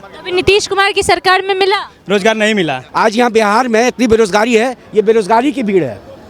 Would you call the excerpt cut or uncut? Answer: cut